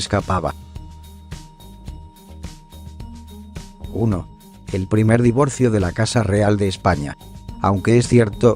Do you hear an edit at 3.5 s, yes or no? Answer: no